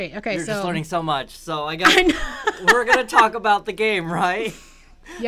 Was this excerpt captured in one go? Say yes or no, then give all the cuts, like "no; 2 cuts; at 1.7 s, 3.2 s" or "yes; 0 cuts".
yes; 0 cuts